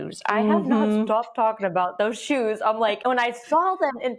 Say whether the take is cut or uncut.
cut